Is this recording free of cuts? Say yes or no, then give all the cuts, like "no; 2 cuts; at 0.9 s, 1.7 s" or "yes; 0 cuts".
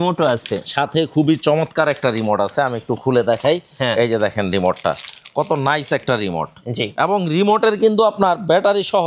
yes; 0 cuts